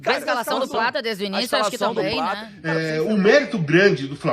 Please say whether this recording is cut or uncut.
cut